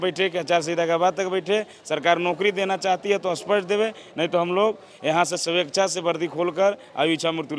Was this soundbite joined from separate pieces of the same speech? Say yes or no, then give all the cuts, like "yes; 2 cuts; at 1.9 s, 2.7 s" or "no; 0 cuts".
no; 0 cuts